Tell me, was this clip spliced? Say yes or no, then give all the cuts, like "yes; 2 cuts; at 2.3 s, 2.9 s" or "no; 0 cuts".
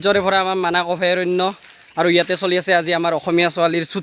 no; 0 cuts